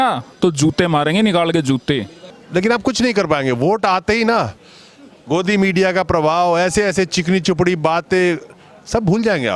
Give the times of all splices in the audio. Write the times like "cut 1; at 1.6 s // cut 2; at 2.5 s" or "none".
none